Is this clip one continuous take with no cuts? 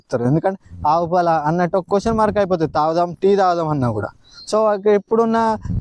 yes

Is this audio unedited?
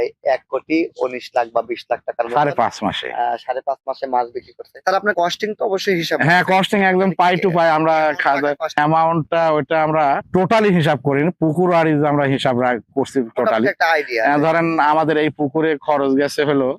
yes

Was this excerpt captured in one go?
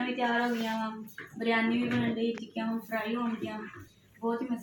yes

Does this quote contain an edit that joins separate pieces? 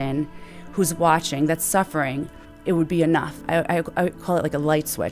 yes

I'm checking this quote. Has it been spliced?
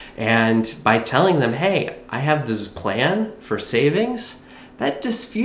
no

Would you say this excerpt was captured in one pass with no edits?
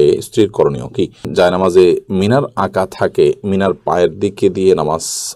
no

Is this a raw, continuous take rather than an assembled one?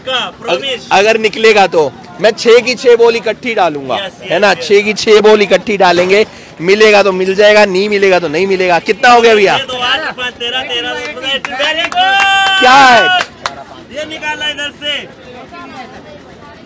yes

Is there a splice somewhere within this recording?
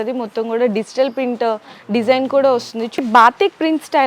yes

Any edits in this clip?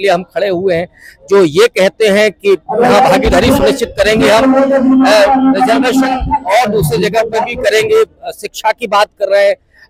no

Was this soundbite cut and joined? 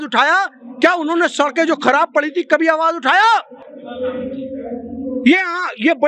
no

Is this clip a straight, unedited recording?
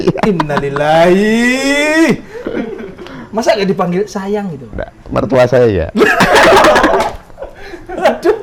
yes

